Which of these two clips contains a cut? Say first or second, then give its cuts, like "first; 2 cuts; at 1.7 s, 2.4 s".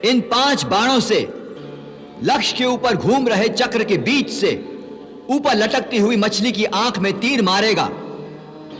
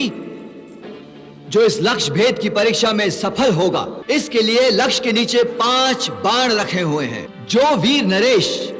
second; 2 cuts; at 3.9 s, 7.3 s